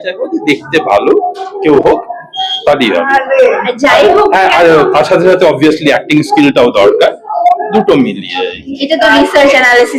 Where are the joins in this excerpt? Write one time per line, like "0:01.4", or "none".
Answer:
none